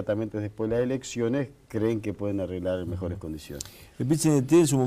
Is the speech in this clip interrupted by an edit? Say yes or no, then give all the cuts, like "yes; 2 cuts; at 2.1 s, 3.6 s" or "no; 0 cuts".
no; 0 cuts